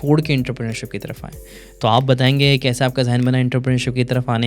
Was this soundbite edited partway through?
no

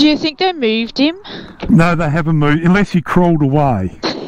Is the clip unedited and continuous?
yes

